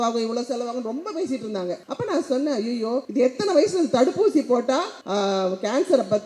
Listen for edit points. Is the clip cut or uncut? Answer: cut